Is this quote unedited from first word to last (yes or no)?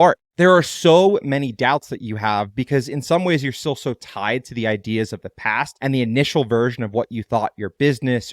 no